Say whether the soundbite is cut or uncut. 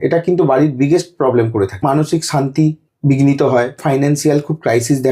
cut